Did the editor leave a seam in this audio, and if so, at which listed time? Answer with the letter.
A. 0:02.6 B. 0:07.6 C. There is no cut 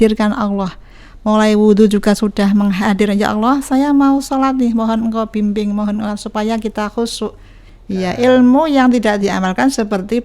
B